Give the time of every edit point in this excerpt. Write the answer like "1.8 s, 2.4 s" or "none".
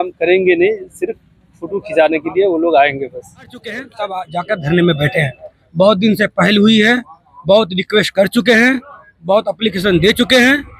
3.9 s